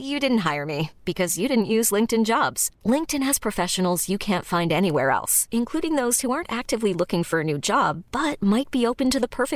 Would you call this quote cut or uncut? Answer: uncut